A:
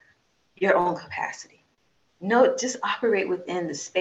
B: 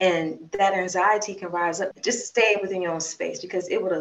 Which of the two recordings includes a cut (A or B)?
B